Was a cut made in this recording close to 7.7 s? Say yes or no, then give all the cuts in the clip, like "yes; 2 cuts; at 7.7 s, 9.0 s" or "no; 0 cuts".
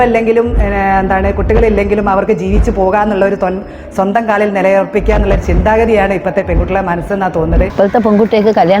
yes; 1 cut; at 7.7 s